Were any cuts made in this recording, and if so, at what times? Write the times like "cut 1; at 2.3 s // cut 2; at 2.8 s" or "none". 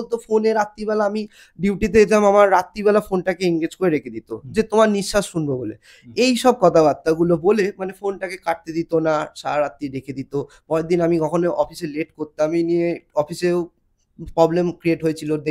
none